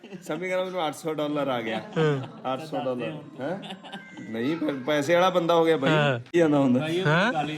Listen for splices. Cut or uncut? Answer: cut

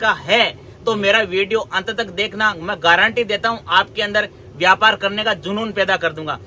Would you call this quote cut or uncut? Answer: uncut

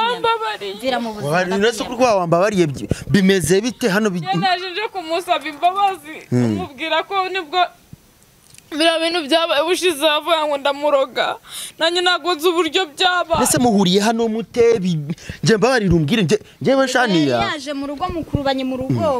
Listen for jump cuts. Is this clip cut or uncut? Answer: uncut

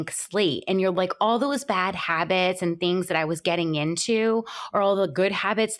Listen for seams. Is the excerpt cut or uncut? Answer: uncut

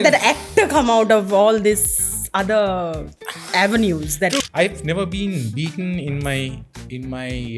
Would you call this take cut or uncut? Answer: cut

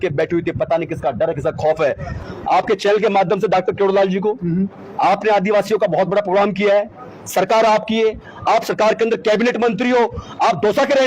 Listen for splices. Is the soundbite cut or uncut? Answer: cut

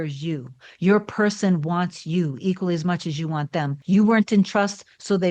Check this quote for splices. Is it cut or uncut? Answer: cut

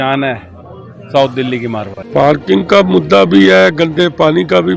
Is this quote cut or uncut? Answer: cut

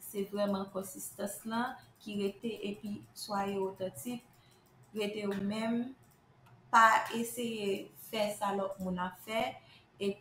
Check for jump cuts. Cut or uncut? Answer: uncut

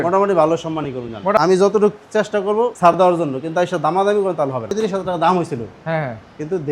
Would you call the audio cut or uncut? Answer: cut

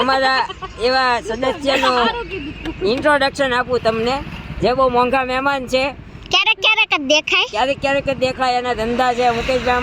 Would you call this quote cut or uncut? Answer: uncut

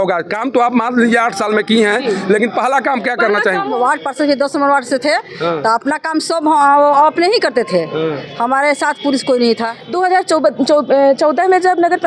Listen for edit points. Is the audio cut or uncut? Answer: cut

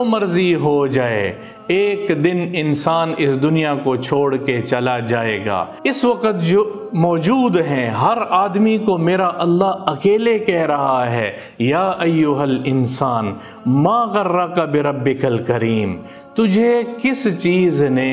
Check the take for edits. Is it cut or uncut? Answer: cut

